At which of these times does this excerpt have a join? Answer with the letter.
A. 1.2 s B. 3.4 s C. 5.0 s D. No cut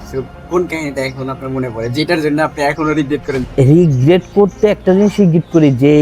B